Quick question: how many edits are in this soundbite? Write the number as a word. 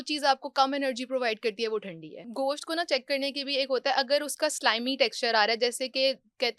one